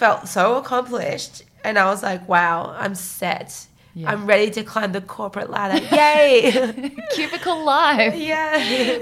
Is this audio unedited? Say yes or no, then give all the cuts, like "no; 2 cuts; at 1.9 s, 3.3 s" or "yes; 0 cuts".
yes; 0 cuts